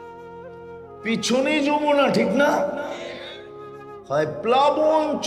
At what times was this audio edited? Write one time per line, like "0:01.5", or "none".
0:01.0